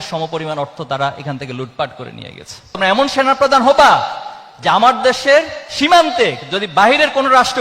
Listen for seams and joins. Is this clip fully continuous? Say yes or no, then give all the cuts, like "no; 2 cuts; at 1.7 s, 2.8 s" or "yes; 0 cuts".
no; 1 cut; at 2.7 s